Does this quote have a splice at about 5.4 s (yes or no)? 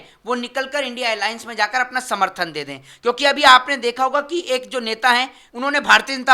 yes